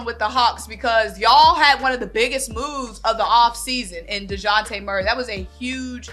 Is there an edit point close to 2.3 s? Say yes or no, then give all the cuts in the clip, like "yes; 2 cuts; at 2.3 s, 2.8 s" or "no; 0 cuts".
no; 0 cuts